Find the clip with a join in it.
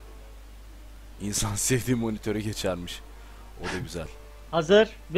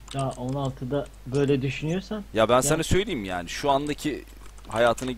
second; 1 cut; at 3.6 s

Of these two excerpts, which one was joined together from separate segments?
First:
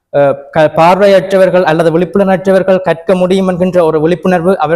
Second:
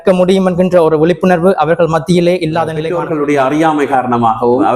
second; 1 cut; at 2.8 s

